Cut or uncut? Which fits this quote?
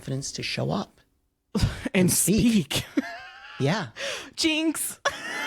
uncut